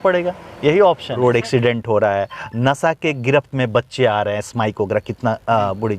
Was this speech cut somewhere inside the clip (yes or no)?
yes